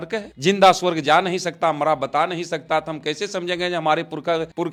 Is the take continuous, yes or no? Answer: yes